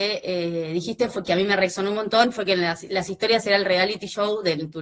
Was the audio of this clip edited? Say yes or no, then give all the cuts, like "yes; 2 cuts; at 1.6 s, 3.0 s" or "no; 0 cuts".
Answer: no; 0 cuts